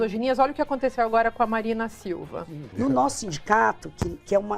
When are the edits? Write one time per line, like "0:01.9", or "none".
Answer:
0:02.7